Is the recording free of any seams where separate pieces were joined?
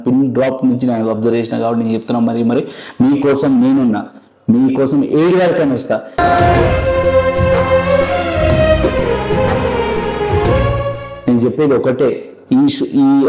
yes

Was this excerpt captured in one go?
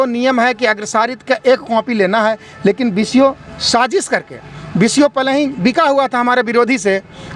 yes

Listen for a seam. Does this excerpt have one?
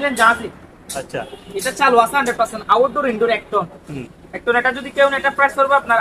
no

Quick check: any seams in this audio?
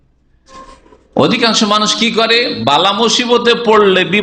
no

